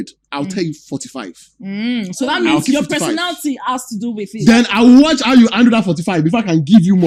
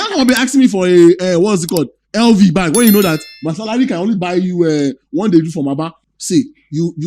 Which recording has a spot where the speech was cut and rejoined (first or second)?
second